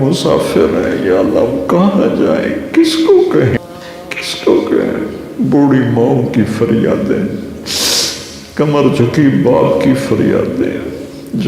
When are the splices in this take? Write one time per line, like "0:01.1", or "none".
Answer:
0:03.6